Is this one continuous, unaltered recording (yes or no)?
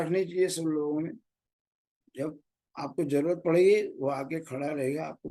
yes